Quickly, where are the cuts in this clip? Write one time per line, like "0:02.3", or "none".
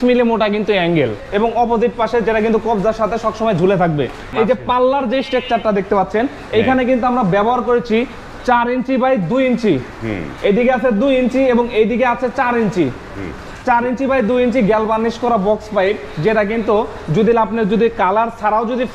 0:01.2
0:04.3